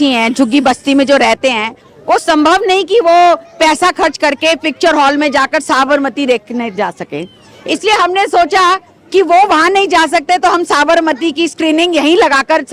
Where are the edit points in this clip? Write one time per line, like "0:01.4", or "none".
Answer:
none